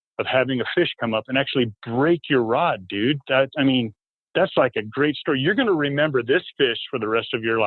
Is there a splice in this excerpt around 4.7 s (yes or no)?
yes